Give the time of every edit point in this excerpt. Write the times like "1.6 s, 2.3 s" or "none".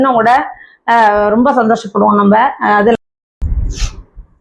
3.0 s

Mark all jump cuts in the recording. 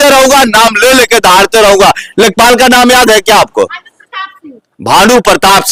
none

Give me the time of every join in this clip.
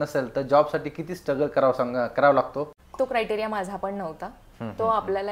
2.8 s

